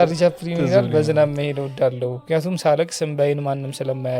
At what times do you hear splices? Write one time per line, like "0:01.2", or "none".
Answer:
0:02.2

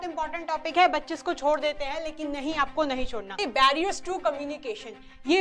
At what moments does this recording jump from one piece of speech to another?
0:03.4

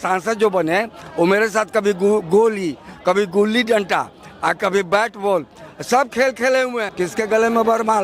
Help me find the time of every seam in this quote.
0:06.9

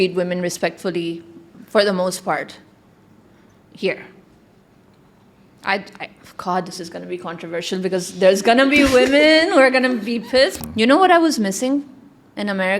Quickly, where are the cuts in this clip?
0:10.5

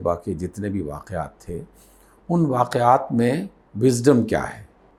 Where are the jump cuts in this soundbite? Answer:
none

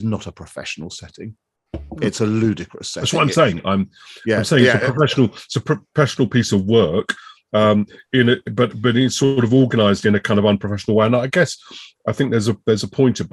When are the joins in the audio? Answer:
none

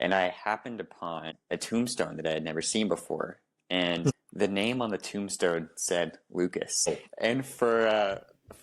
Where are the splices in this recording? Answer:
0:01.3
0:04.2
0:06.9

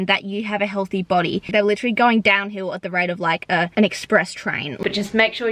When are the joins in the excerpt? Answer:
0:01.5
0:03.7
0:04.7

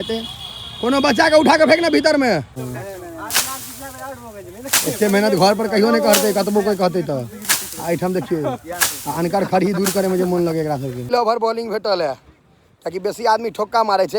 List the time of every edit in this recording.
0:02.6
0:11.0

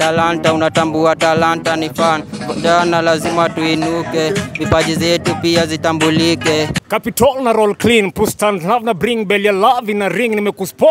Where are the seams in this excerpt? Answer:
0:06.8

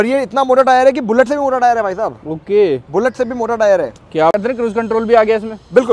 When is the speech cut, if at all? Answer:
0:04.3

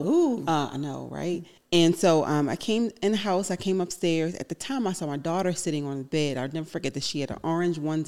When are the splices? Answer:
0:01.5

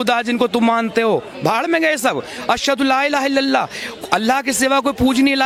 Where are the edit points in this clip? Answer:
none

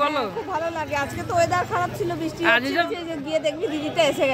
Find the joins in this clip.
0:02.9

